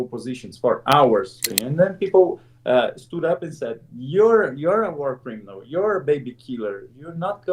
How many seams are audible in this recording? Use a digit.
1